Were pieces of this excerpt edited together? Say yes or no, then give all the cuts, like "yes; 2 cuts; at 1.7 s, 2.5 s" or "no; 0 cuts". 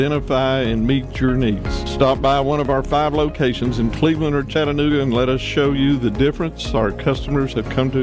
no; 0 cuts